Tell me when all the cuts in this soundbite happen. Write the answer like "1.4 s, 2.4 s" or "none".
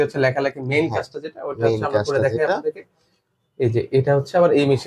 none